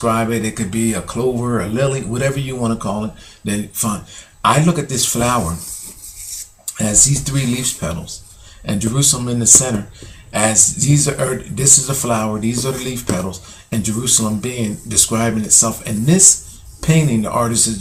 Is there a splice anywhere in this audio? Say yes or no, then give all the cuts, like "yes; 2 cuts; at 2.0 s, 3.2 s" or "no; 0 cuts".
no; 0 cuts